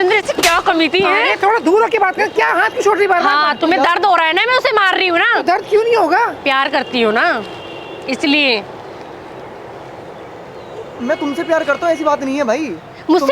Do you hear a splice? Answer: no; 0 cuts

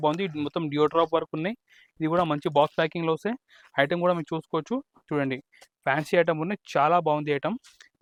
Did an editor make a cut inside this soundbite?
no; 0 cuts

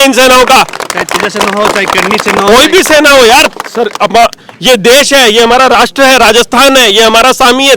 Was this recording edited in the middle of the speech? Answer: no; 0 cuts

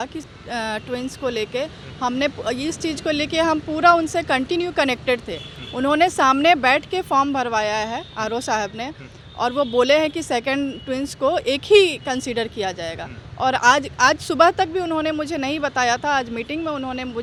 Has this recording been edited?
no; 0 cuts

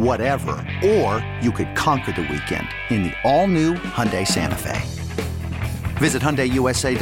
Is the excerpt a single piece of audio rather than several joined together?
yes; 0 cuts

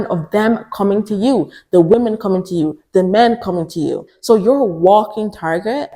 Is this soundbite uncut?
no; 1 cut; at 4.1 s

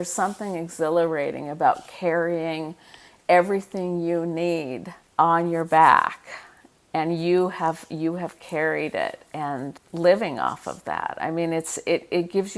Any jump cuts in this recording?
yes; 2 cuts; at 4.6 s, 9.8 s

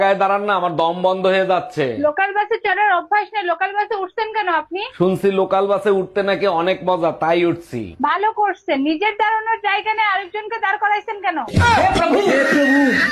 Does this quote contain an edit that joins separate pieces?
no; 0 cuts

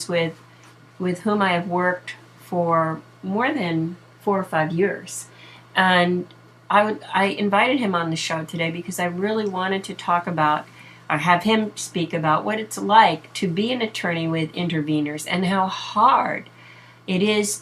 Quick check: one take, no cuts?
yes; 0 cuts

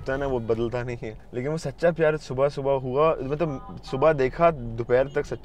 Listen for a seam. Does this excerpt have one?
yes; 1 cut; at 1.1 s

